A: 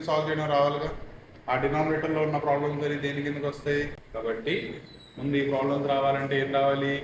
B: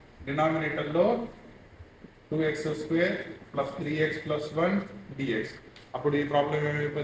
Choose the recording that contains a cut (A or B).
A